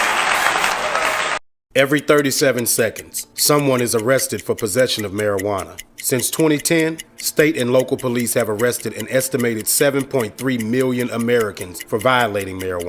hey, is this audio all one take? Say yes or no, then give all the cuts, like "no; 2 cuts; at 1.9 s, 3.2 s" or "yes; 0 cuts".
no; 1 cut; at 1.5 s